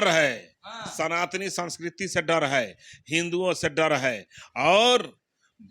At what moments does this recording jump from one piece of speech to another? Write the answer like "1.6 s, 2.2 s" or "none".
none